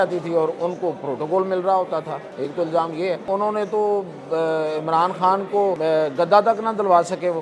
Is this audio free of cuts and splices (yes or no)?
no